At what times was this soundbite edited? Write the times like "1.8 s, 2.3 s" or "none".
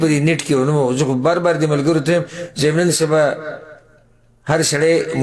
none